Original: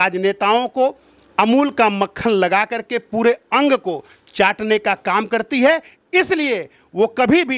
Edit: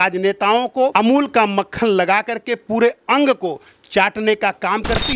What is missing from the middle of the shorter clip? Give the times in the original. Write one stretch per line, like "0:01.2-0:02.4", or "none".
0:00.9-0:01.4

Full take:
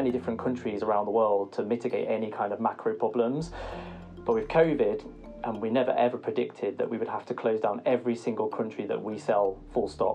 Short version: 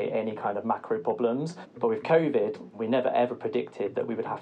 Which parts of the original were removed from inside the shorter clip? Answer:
0:03.6-0:04.1
0:05.1-0:05.5

